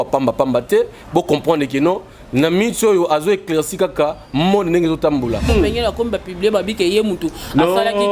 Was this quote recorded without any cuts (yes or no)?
no